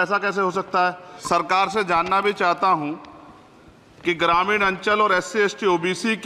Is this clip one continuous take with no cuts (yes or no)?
no